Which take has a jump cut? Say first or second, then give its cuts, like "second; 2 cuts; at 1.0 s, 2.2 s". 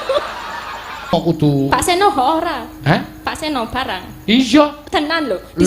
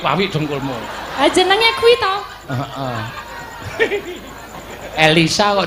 first; 1 cut; at 1.1 s